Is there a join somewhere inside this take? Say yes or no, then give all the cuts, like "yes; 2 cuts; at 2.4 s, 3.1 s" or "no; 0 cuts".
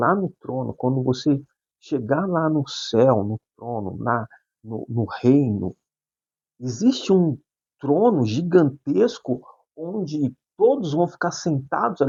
no; 0 cuts